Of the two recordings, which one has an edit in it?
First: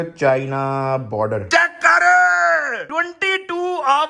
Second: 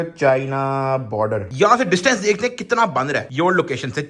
first; 1 cut; at 1.4 s

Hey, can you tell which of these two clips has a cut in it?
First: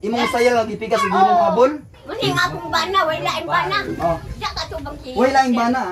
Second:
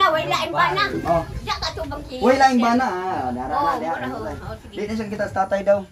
first; 1 cut; at 1.9 s

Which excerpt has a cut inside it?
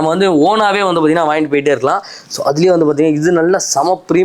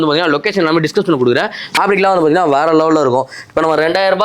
second; 1 cut; at 1.8 s

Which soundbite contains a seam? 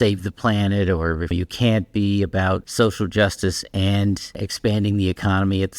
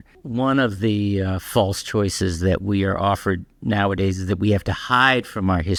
first; 3 cuts; at 1.3 s, 2.7 s, 4.4 s

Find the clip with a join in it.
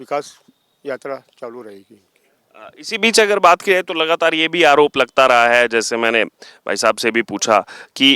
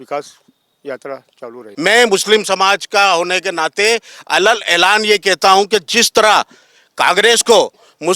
second; 1 cut; at 1.6 s

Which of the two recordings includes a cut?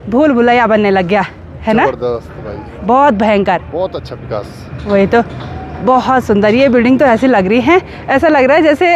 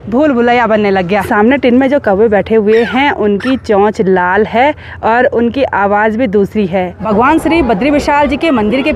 second; 2 cuts; at 1.3 s, 7.0 s

